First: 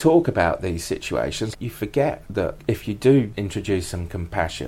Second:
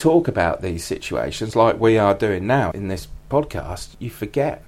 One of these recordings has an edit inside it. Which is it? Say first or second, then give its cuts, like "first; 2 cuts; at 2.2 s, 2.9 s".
first; 3 cuts; at 1.5 s, 2.6 s, 3.3 s